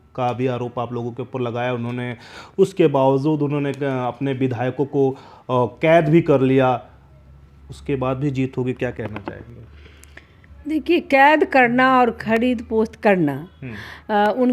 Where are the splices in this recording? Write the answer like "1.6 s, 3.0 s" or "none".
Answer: none